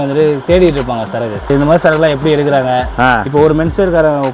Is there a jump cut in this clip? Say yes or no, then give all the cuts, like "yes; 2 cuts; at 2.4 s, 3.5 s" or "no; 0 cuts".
yes; 1 cut; at 1.5 s